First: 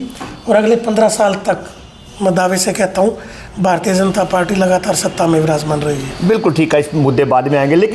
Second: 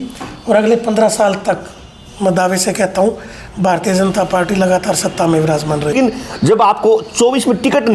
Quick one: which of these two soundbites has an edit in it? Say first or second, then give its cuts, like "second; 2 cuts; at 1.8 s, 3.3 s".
second; 1 cut; at 5.9 s